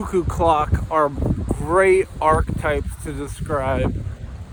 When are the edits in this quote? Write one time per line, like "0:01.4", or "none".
none